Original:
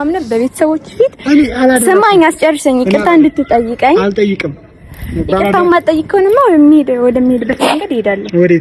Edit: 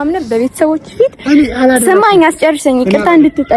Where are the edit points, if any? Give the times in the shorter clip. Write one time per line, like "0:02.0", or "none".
none